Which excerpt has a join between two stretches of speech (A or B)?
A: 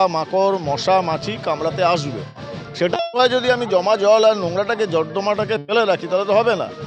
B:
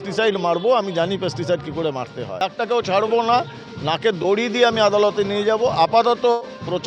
B